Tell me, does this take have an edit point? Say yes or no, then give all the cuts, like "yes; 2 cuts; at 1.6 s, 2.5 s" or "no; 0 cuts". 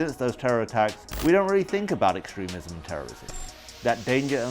yes; 2 cuts; at 1.0 s, 3.3 s